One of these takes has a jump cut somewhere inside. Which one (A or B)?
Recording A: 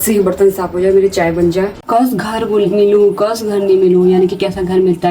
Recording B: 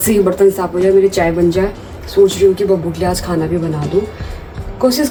A